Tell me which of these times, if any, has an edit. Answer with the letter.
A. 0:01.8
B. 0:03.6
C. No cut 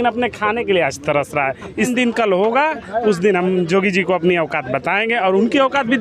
A